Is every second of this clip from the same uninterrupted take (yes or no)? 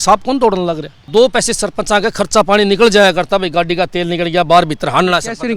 no